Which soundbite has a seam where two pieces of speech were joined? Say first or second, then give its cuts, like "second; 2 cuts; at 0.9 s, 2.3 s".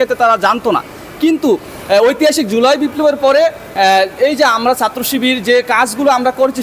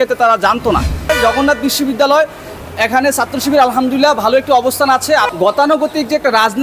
second; 2 cuts; at 1.1 s, 5.3 s